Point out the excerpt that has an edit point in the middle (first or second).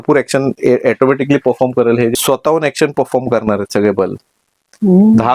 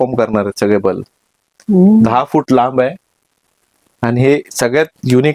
first